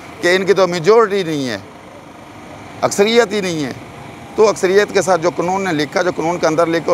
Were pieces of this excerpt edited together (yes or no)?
no